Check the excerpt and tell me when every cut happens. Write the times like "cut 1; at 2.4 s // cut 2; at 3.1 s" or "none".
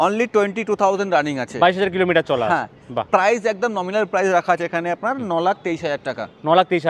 none